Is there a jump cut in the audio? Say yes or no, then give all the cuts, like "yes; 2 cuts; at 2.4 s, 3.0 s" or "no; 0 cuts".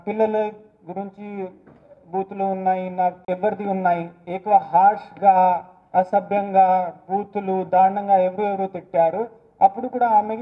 yes; 1 cut; at 3.2 s